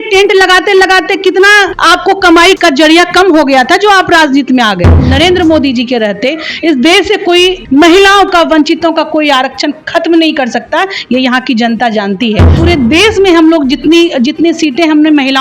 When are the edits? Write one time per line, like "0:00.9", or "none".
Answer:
0:01.8
0:02.6
0:05.0
0:07.6
0:12.5